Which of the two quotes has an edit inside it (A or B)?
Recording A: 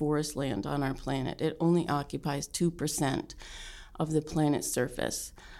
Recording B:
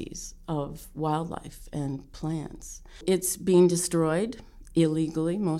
B